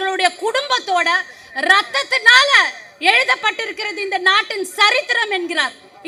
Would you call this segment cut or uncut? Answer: uncut